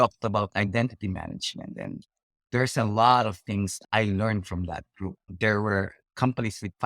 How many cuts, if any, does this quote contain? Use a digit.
2